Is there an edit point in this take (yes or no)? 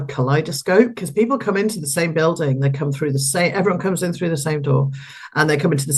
no